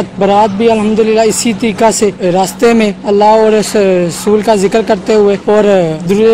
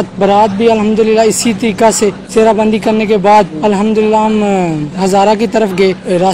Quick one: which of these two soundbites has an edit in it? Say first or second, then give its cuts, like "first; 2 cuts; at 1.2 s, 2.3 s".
first; 2 cuts; at 2.2 s, 5.4 s